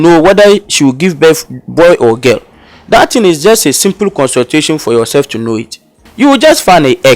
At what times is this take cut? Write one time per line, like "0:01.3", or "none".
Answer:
0:06.0